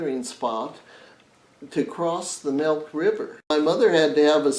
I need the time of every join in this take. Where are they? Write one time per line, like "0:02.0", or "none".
0:03.5